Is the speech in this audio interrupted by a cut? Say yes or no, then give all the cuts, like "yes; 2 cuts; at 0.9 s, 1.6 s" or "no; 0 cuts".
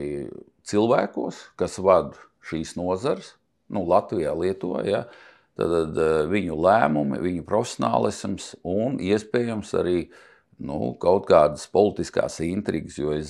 no; 0 cuts